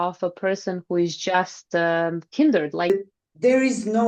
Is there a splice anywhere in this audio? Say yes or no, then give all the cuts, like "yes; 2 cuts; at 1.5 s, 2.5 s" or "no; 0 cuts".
yes; 1 cut; at 2.9 s